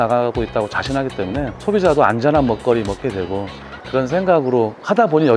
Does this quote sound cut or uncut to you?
cut